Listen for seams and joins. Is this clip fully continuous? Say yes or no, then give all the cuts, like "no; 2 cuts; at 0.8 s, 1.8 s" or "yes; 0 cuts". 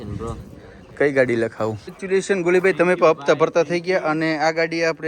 no; 1 cut; at 1.9 s